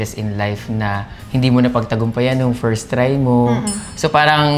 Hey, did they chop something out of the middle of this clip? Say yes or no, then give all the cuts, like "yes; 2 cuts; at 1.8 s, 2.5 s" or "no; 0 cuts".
no; 0 cuts